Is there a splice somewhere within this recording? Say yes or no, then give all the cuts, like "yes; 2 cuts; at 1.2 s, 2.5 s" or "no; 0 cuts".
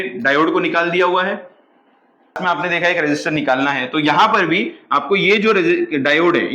yes; 1 cut; at 2.4 s